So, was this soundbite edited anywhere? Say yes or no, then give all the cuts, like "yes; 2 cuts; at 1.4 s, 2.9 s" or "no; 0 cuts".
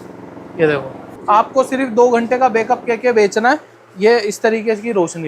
yes; 1 cut; at 1.1 s